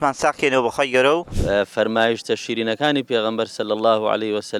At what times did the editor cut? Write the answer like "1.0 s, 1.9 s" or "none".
1.3 s